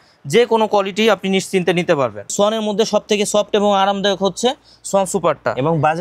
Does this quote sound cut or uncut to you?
cut